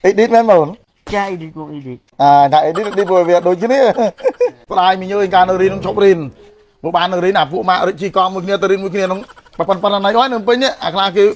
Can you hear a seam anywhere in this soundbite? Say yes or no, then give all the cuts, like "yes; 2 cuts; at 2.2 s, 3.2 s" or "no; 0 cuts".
yes; 1 cut; at 4.6 s